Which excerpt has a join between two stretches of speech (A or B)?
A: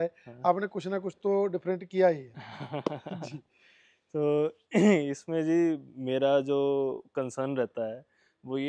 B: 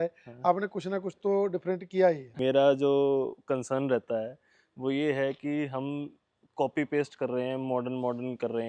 B